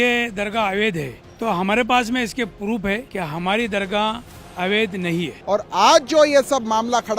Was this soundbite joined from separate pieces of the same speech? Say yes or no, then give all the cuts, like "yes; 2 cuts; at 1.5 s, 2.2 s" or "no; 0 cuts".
yes; 3 cuts; at 1.2 s, 3.1 s, 5.4 s